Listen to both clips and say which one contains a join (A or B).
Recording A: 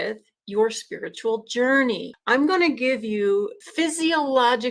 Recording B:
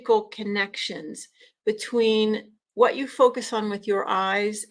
A